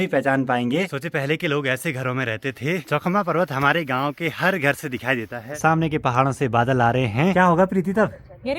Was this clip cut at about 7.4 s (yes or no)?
no